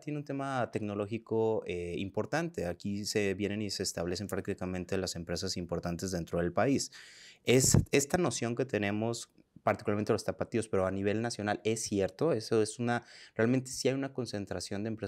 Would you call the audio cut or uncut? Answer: uncut